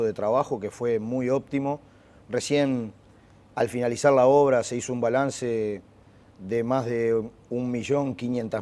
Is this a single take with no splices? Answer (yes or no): yes